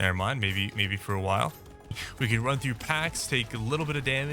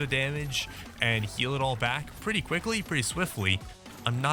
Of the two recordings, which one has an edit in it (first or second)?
first